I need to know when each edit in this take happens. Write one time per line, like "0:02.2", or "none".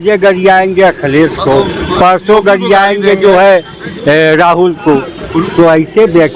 none